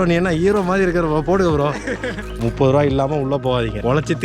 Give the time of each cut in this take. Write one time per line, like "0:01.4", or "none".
0:02.4

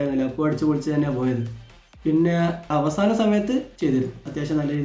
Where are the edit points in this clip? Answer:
none

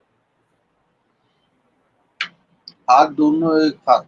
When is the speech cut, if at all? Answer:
none

